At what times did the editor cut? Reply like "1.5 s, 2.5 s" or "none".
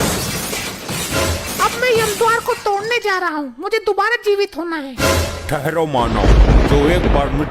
1.4 s

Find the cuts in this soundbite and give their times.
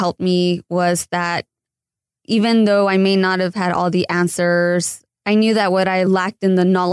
5.0 s, 6.0 s

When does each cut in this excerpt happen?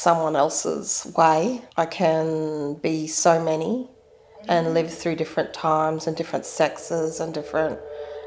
1.6 s

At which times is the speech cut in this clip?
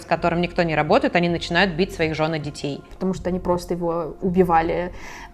2.9 s

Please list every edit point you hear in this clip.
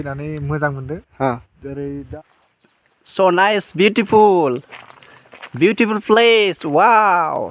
2.1 s

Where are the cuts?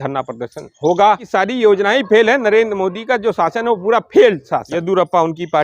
1.2 s, 4.7 s

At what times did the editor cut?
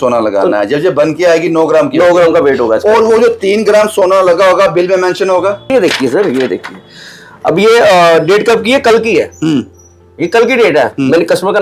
none

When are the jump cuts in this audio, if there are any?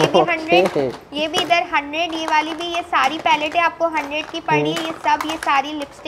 none

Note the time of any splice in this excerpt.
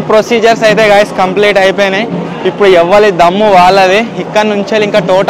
none

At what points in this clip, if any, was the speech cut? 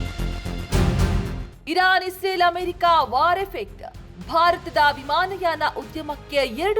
1.2 s

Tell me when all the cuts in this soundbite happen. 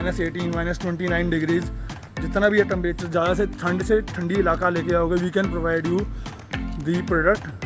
none

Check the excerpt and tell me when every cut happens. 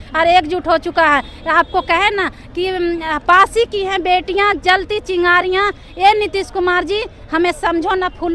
none

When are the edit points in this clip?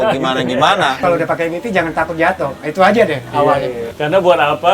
1.0 s, 3.9 s

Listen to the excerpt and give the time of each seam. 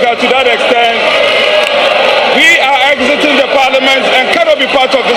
none

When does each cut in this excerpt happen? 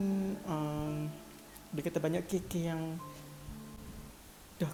none

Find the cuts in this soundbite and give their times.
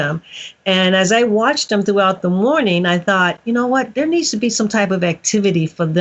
none

